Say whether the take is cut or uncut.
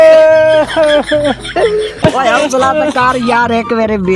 cut